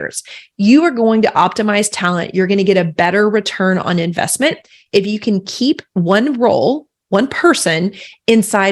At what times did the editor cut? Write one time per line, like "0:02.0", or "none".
0:05.9